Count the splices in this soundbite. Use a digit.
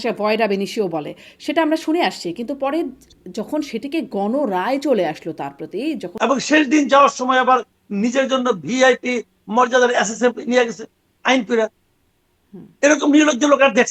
1